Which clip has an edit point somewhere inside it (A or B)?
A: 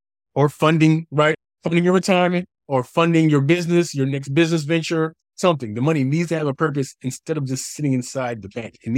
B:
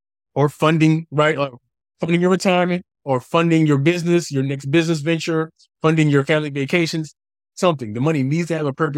A